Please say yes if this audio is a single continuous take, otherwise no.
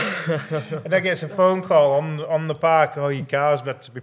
yes